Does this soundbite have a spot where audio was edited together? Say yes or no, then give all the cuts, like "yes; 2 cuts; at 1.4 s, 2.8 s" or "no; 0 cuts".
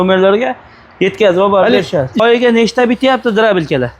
yes; 1 cut; at 2.2 s